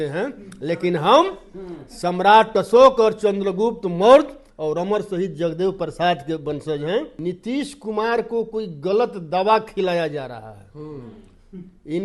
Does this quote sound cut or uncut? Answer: cut